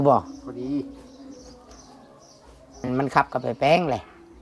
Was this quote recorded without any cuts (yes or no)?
no